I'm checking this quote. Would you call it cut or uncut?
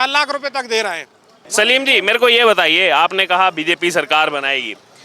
cut